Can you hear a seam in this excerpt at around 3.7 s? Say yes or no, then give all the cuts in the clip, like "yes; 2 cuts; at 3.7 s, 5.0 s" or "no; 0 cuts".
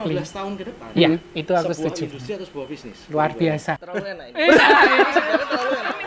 yes; 1 cut; at 3.7 s